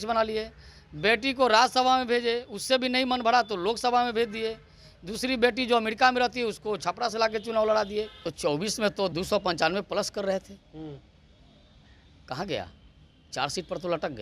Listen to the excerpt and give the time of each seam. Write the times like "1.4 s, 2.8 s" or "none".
8.2 s, 9.1 s